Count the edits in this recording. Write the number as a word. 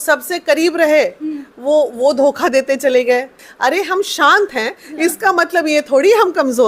one